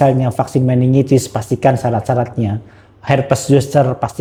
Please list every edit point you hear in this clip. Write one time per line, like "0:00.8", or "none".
none